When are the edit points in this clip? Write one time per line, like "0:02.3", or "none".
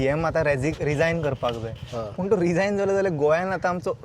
none